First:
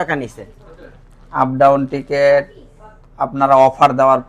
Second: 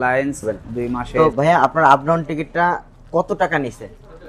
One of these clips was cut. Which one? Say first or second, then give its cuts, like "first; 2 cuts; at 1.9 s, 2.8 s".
second; 1 cut; at 1.1 s